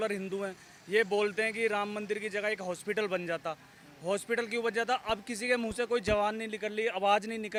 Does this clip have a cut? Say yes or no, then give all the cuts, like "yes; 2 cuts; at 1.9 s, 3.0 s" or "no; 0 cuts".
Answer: no; 0 cuts